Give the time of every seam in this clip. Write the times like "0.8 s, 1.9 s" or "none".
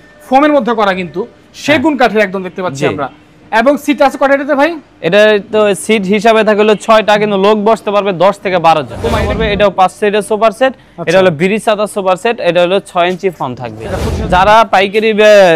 9.2 s, 14.1 s

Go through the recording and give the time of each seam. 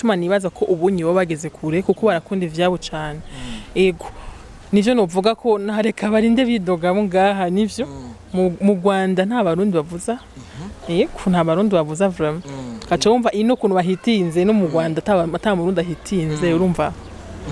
none

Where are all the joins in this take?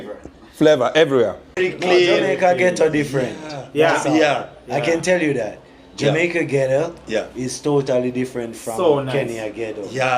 1.5 s

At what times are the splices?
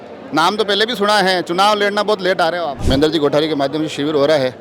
2.8 s

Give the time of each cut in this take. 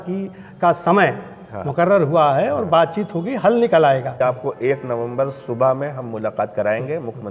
4.1 s

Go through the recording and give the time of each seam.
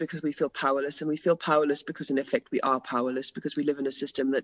none

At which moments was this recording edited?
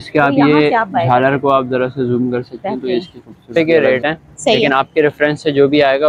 3.6 s

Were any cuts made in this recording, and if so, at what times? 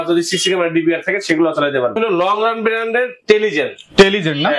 2.0 s

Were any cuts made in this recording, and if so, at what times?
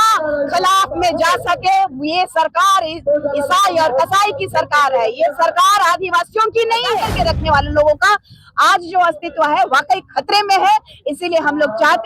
7.1 s

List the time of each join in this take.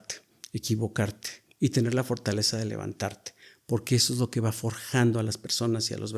none

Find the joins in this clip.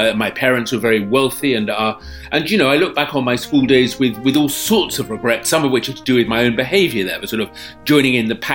none

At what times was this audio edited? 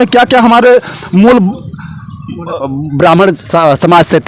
2.6 s

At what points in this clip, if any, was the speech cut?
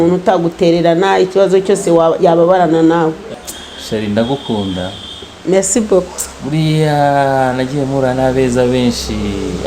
3.3 s

